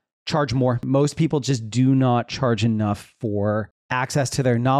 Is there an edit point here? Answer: yes; 2 cuts; at 0.8 s, 3.8 s

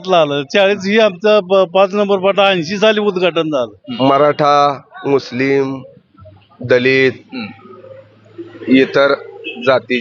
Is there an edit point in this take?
yes; 1 cut; at 3.8 s

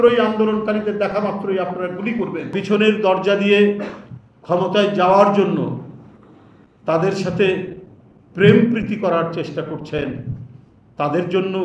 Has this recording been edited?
yes; 1 cut; at 2.5 s

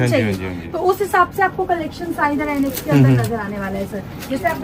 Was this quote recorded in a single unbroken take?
yes; 0 cuts

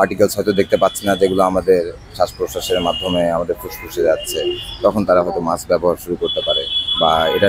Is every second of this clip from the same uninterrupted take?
yes; 0 cuts

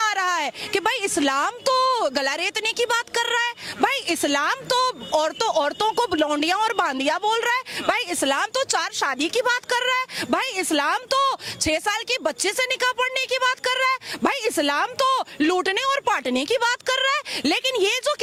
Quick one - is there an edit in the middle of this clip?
no; 0 cuts

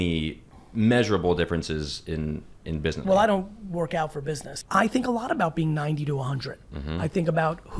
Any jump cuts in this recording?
yes; 2 cuts; at 3.0 s, 4.5 s

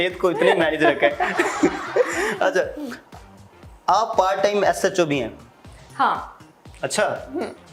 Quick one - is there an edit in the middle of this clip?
no; 0 cuts

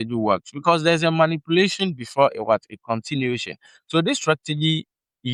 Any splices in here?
no; 0 cuts

